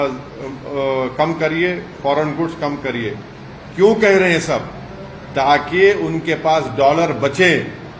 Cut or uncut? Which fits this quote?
uncut